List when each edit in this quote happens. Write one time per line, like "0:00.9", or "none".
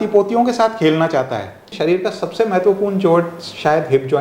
0:01.7